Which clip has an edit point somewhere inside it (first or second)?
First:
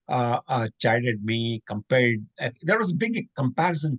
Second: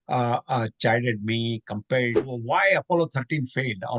second